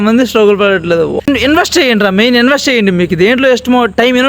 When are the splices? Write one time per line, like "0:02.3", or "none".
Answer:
0:01.2